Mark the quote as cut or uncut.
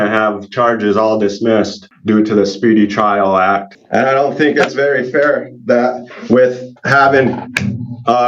cut